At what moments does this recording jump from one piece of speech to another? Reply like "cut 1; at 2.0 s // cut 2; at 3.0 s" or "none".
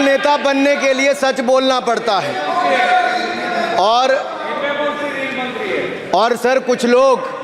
none